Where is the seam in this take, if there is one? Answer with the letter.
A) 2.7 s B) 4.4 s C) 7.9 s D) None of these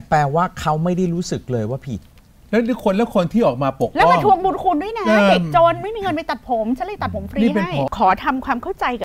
C